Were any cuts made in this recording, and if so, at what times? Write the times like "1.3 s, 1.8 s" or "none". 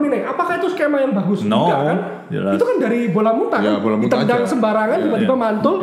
none